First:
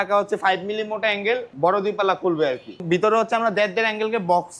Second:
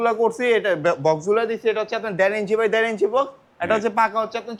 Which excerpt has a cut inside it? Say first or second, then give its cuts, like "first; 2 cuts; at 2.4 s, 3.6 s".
first; 2 cuts; at 1.5 s, 2.8 s